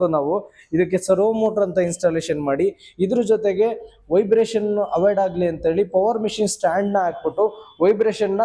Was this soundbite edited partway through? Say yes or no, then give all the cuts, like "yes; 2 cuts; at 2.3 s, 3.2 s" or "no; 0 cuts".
no; 0 cuts